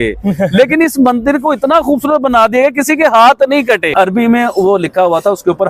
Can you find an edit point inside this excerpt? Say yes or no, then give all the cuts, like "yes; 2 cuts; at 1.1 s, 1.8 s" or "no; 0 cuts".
yes; 1 cut; at 3.9 s